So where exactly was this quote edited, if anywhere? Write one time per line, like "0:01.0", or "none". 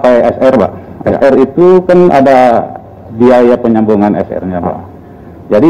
none

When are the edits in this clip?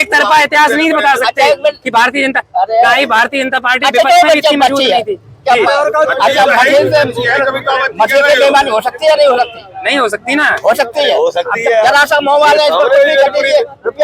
none

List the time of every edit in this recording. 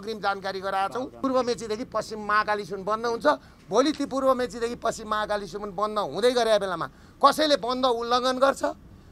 0:01.1

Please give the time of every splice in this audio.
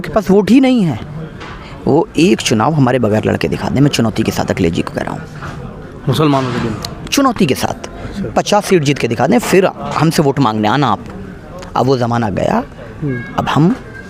none

